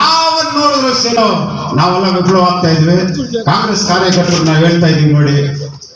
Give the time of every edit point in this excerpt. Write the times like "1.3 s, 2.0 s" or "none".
1.2 s